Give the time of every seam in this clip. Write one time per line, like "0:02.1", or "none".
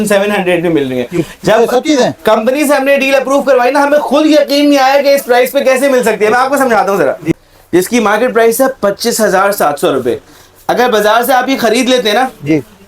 0:07.3